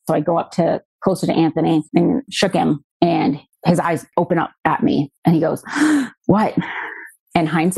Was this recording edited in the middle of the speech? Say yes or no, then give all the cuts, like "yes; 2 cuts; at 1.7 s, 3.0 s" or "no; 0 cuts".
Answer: yes; 2 cuts; at 2.4 s, 4.1 s